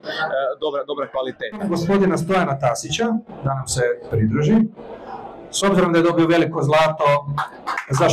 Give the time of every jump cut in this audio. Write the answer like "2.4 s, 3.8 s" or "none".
1.5 s